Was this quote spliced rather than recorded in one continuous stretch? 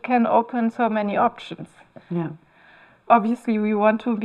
no; 0 cuts

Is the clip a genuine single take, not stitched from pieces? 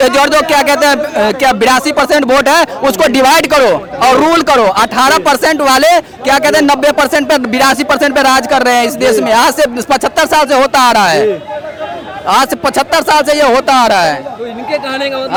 yes; 0 cuts

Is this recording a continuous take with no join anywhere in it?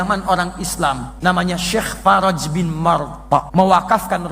no; 2 cuts; at 1.1 s, 3.5 s

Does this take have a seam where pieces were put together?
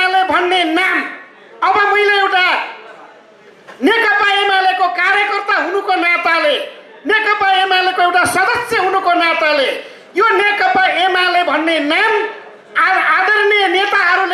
no; 0 cuts

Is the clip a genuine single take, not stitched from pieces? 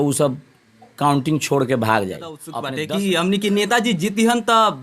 no; 1 cut; at 2.5 s

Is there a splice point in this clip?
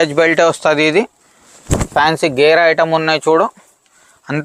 no; 0 cuts

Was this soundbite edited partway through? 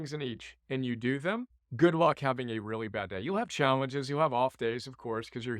yes; 1 cut; at 1.6 s

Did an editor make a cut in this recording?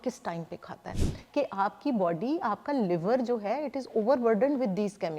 yes; 1 cut; at 1.1 s

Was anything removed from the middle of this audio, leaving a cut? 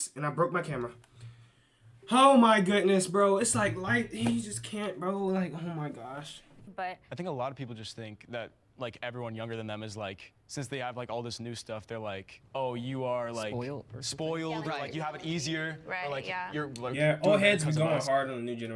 yes; 1 cut; at 6.7 s

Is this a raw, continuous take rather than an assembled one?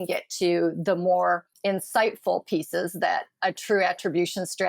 no; 1 cut; at 1.5 s

